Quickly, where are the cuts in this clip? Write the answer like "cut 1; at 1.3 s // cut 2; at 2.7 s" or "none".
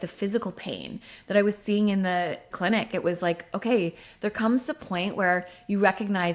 none